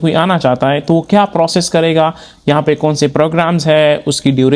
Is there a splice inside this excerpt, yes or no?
no